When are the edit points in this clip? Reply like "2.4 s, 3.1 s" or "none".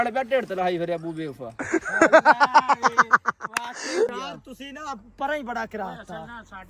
4.1 s